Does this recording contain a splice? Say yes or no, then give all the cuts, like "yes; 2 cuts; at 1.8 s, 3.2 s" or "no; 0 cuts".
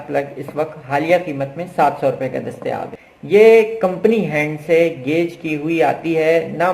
yes; 1 cut; at 2.9 s